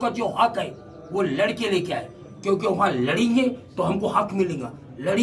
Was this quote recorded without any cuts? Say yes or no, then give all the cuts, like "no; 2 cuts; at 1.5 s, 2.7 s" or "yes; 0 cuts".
yes; 0 cuts